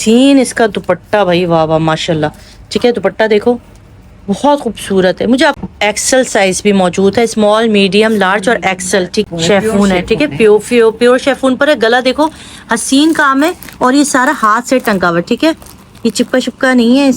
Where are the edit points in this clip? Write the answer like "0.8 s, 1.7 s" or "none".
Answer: 5.6 s, 9.3 s